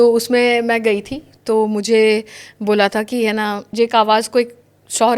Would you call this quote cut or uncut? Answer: cut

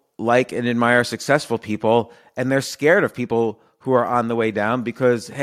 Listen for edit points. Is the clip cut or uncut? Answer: uncut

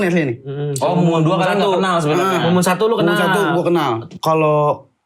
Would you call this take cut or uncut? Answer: cut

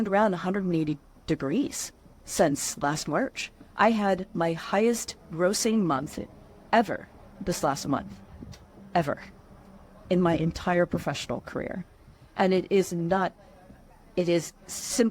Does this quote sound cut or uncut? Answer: uncut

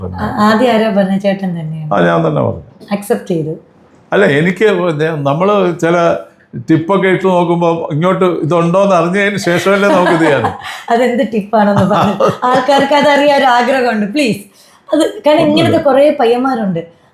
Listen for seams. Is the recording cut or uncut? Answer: uncut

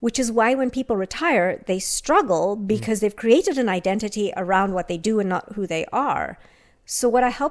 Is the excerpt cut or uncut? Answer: uncut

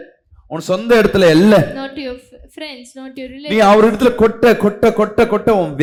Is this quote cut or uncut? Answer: uncut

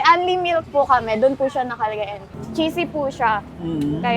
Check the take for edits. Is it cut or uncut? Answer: cut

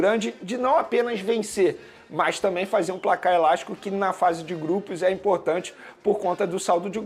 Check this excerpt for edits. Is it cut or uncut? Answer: uncut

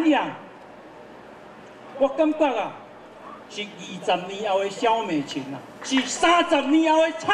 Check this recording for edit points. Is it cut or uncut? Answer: cut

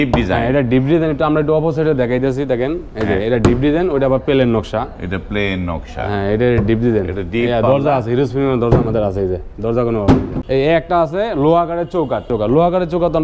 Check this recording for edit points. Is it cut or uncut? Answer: cut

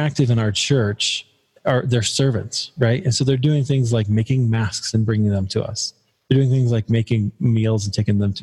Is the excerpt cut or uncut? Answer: cut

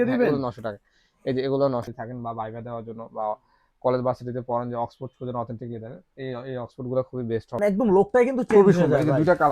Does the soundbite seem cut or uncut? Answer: cut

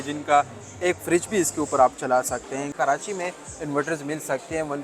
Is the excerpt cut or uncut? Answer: cut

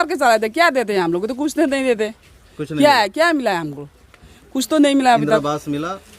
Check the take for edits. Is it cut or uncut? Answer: uncut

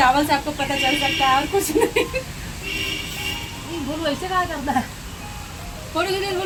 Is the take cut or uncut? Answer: uncut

